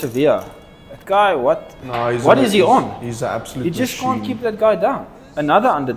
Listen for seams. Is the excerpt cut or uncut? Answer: uncut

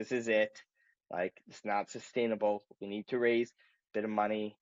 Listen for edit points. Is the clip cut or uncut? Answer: uncut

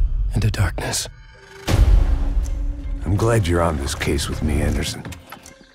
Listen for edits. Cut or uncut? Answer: cut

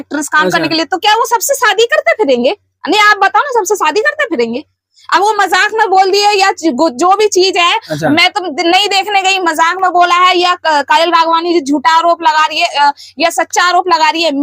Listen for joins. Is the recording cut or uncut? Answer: uncut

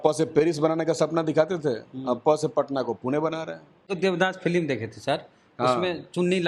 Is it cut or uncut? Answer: cut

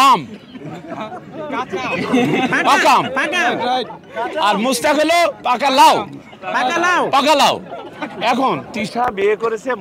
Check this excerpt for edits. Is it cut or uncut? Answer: cut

